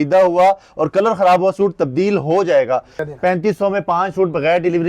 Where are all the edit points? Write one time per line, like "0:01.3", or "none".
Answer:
0:02.9